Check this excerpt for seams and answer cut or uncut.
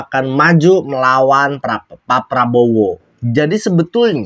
cut